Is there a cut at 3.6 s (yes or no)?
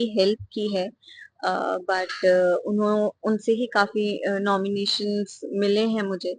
no